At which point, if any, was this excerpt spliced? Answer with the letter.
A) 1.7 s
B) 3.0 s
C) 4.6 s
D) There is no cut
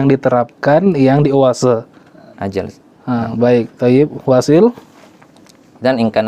D